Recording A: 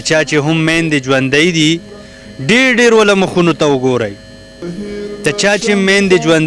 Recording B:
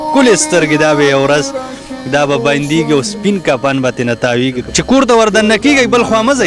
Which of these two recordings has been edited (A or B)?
B